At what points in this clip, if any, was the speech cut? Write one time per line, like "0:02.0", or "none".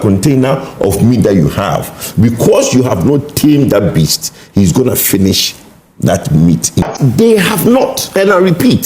0:06.8